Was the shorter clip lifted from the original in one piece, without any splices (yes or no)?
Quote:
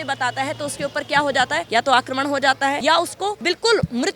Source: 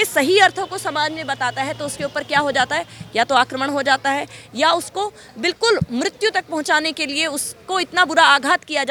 no